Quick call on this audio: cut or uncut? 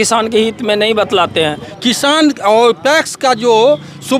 cut